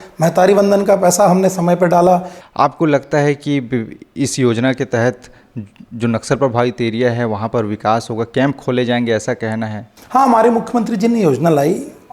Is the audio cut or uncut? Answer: cut